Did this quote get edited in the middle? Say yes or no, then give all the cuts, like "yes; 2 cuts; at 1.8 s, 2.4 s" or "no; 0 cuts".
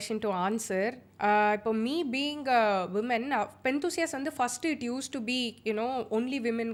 no; 0 cuts